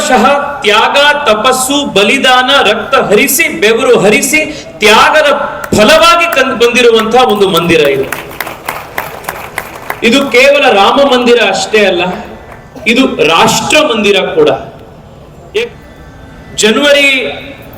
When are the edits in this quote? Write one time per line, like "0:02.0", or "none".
0:15.6